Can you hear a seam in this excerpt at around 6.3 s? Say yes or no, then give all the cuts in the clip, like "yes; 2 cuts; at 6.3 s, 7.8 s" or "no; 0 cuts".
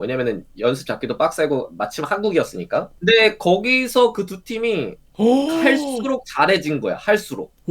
no; 1 cut; at 2.9 s